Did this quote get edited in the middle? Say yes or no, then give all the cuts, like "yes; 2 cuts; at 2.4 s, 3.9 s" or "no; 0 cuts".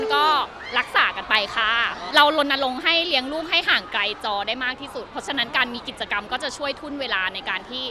yes; 1 cut; at 2.0 s